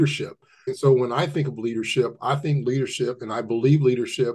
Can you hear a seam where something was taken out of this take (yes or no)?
no